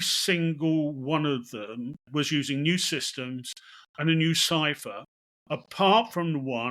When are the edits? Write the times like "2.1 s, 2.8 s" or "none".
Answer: 2.0 s